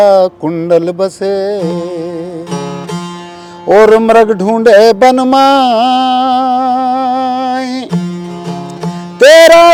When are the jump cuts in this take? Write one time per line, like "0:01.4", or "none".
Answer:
none

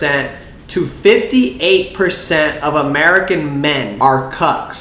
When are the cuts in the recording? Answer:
0:03.9

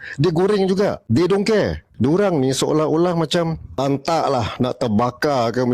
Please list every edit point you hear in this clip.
0:01.0
0:01.8
0:03.8

